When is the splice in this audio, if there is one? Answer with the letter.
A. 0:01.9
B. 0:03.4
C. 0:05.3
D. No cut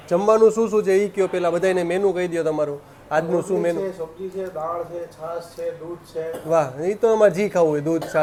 D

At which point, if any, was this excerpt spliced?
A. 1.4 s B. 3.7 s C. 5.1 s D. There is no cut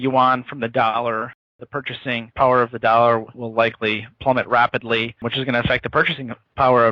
D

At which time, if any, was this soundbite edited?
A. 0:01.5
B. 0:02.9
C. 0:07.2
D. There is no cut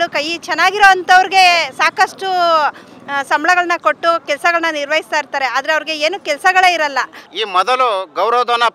C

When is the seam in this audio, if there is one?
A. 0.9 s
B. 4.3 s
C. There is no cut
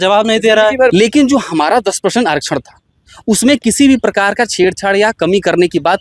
A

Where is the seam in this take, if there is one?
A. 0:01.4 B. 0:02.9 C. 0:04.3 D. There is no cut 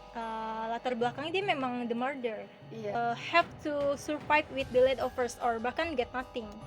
B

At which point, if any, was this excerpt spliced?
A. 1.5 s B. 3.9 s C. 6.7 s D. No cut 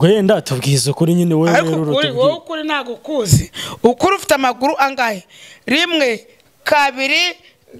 D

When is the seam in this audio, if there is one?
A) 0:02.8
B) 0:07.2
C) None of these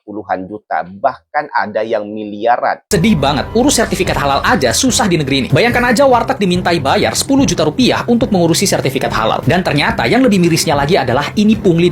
A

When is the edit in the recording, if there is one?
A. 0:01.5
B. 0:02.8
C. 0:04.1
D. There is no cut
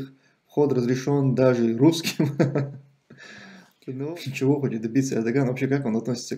C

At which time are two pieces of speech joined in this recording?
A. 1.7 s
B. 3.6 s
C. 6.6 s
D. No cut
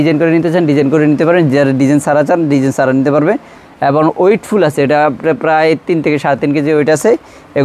B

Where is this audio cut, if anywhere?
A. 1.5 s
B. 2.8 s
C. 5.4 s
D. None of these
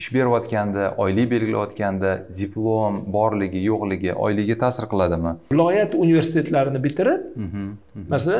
C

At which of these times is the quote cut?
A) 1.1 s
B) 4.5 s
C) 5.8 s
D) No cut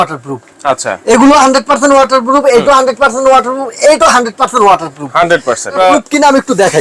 C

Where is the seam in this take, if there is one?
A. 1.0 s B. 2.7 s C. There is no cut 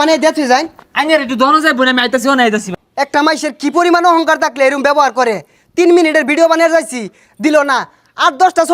B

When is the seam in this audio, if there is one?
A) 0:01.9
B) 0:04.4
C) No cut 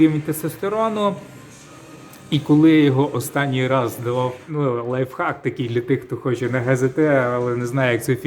B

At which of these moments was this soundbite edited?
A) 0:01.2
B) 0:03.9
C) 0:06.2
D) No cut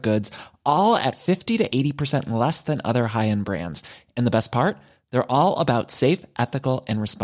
D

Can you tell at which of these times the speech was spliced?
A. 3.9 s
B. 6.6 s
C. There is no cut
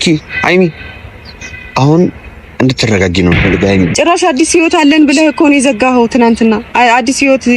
A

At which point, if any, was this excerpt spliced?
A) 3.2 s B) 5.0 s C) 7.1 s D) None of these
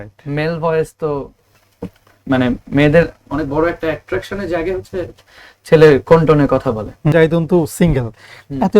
C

